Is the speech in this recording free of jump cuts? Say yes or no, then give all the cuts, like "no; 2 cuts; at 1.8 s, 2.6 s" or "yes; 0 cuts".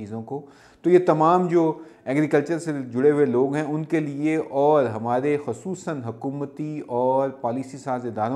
yes; 0 cuts